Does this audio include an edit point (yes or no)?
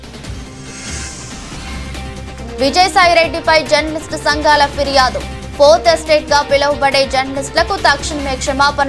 no